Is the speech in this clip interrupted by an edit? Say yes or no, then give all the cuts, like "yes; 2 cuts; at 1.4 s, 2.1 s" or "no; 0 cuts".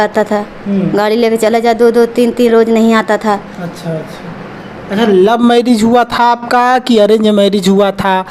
no; 0 cuts